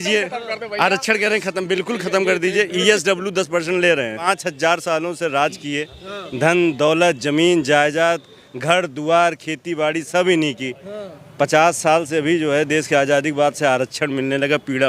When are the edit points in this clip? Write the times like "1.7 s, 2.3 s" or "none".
4.2 s